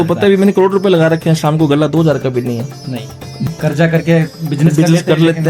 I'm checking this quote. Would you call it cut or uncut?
cut